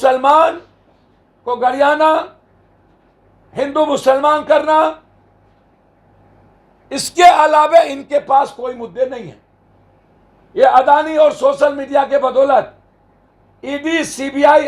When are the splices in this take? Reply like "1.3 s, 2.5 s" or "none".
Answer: none